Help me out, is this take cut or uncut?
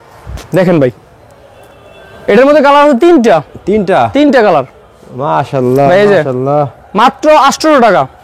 uncut